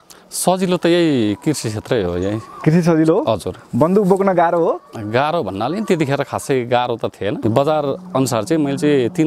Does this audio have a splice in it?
yes; 1 cut; at 7.4 s

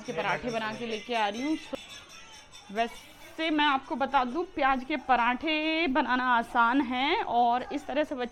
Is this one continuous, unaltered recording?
yes; 0 cuts

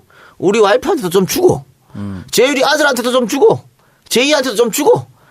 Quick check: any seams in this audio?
yes; 1 cut; at 1.1 s

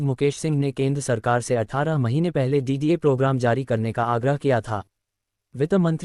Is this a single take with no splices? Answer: yes; 0 cuts

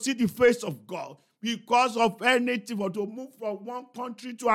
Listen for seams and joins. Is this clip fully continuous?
yes; 0 cuts

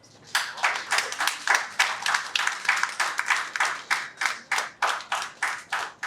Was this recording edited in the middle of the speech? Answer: no; 0 cuts

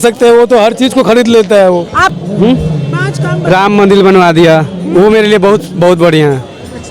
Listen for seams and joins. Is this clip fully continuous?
no; 1 cut; at 2.0 s

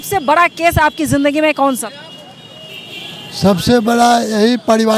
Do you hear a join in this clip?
no; 0 cuts

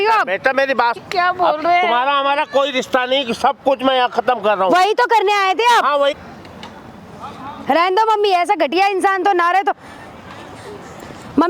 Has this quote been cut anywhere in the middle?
yes; 2 cuts; at 1.0 s, 6.1 s

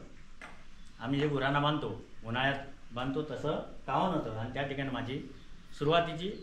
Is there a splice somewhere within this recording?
no; 0 cuts

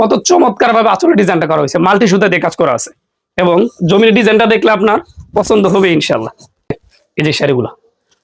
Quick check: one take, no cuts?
no; 1 cut; at 6.9 s

